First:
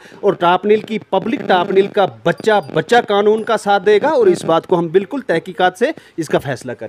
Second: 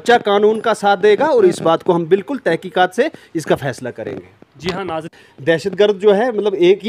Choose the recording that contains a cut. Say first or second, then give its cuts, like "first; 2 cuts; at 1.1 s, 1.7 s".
second; 1 cut; at 5.1 s